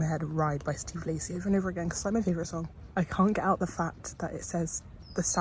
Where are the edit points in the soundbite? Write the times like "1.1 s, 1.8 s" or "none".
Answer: 2.8 s